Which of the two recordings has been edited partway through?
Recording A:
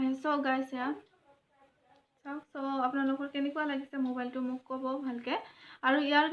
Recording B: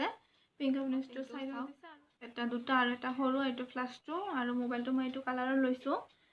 B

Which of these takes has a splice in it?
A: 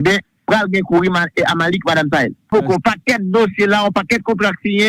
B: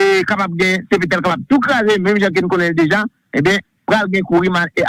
A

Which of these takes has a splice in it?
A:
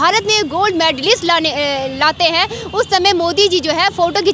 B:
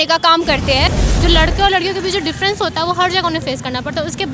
B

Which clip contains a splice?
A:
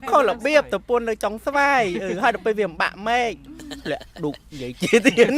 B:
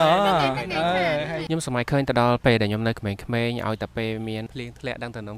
B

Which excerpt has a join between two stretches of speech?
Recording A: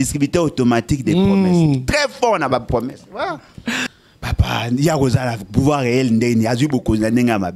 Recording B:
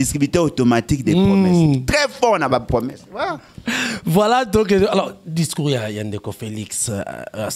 A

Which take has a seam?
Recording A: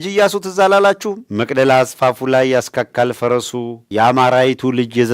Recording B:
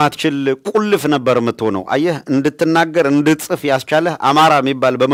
A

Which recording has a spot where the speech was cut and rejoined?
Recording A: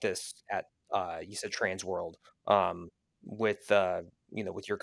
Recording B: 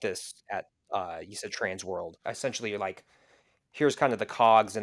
B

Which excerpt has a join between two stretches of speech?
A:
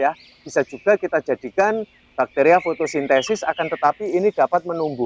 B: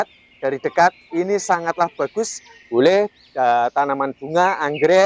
B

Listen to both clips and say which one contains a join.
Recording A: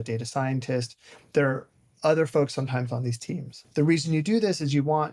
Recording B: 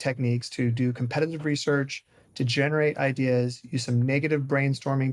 A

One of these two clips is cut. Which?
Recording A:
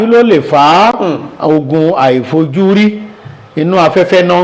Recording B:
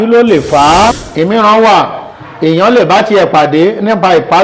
B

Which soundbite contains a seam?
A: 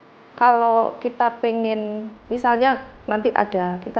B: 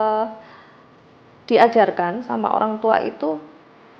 A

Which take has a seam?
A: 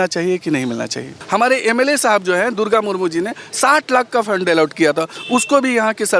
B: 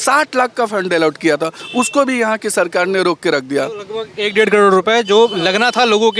A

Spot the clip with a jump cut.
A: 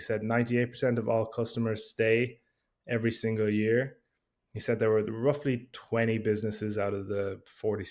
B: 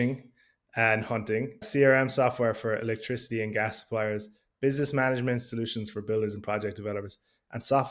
B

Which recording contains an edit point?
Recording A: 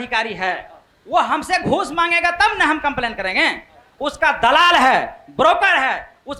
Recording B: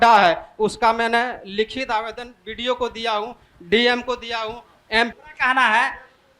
B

